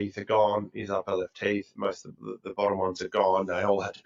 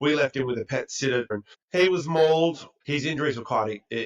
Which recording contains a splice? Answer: second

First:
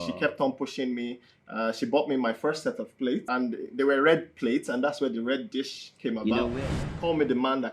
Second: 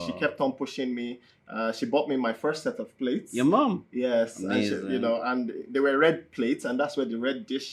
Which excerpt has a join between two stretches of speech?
first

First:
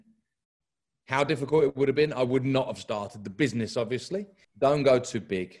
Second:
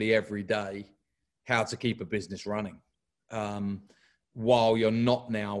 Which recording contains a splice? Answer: first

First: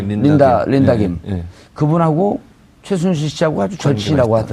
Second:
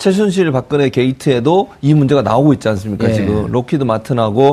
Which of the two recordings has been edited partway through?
first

